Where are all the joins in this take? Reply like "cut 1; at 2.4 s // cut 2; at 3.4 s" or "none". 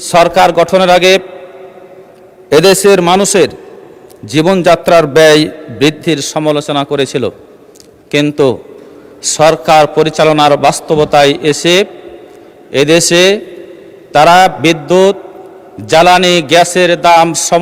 none